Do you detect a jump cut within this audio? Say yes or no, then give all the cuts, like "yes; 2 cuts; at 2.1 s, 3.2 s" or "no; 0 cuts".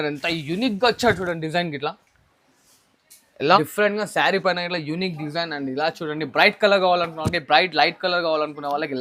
yes; 1 cut; at 3.6 s